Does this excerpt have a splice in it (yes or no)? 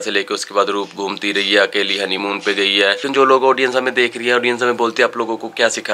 yes